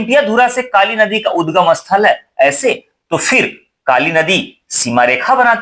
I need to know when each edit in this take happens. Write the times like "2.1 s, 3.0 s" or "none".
none